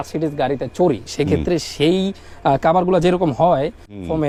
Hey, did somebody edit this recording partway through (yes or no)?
no